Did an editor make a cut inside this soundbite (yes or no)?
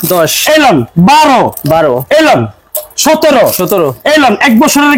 no